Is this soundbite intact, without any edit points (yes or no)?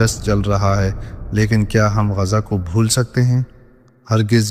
yes